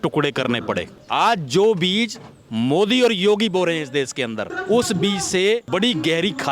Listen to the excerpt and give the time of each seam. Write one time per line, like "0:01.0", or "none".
0:01.0
0:04.5
0:05.6